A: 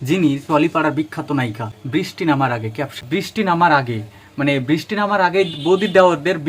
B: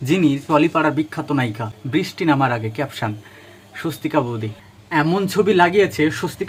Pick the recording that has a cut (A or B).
A